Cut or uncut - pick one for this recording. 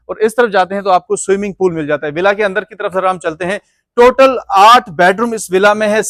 uncut